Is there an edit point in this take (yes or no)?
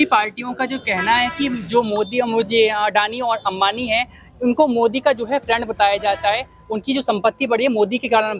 no